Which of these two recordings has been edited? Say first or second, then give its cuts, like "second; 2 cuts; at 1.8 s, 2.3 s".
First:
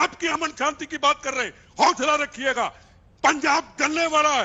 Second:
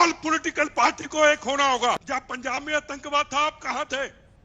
second; 1 cut; at 1.9 s